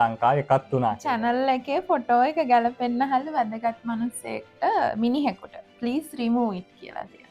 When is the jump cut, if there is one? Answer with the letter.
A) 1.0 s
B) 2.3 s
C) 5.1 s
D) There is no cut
A